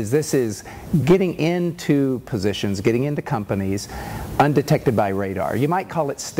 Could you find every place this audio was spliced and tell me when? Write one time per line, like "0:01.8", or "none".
none